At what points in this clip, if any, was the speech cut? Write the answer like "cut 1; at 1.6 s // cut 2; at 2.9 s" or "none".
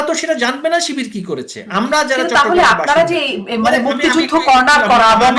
none